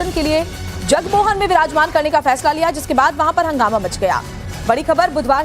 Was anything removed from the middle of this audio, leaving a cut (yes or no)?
yes